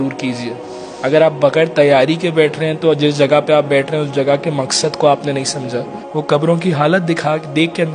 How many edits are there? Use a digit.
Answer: 1